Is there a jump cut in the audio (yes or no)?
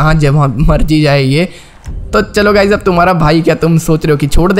no